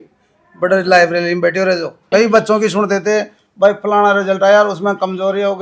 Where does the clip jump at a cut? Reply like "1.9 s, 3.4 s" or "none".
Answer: 1.9 s